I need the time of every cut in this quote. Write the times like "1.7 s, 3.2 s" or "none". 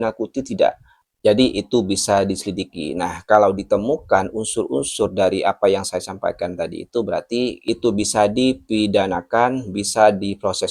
none